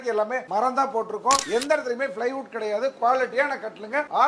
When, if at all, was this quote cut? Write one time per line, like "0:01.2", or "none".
0:01.5